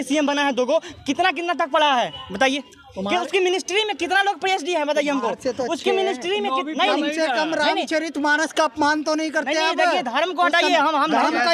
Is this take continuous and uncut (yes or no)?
yes